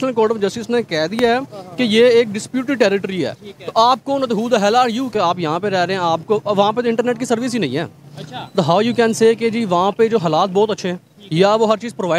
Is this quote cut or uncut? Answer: cut